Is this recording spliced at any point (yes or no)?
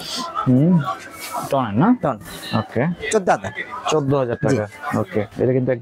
no